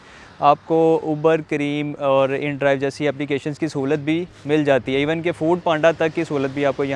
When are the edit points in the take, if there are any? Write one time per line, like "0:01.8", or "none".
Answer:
none